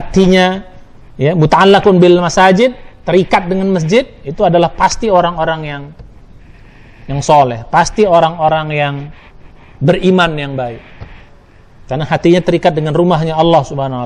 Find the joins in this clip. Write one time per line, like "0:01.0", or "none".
none